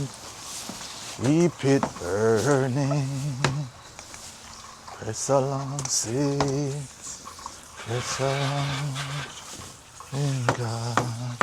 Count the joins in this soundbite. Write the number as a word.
zero